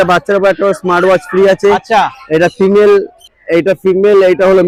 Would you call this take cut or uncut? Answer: uncut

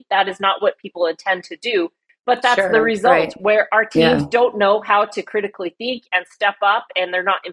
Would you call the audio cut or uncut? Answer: uncut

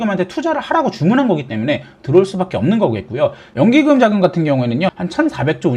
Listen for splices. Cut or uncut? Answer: cut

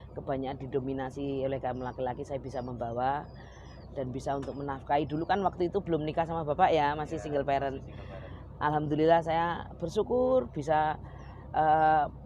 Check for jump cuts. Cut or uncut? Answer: uncut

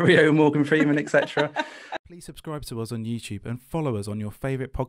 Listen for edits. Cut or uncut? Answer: cut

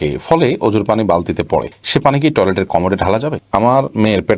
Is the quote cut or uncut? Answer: cut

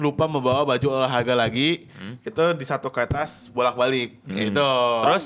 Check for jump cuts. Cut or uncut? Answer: uncut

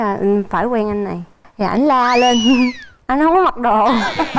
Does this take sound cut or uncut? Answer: cut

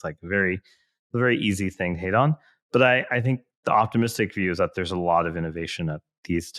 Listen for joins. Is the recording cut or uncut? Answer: uncut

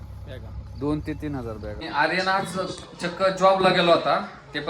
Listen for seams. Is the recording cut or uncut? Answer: cut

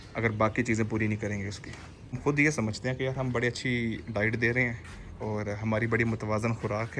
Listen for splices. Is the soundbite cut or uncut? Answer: cut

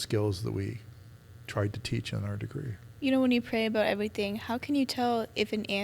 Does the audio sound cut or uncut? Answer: cut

